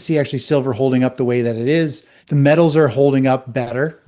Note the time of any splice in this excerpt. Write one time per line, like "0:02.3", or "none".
0:02.2